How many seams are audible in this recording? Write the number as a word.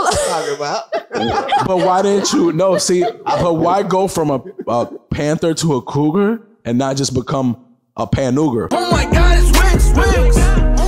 one